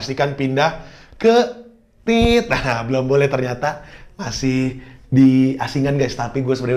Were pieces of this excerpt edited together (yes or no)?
no